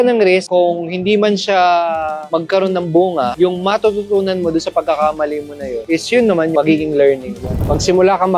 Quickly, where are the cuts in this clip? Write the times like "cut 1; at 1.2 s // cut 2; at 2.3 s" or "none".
cut 1; at 6.5 s // cut 2; at 7.5 s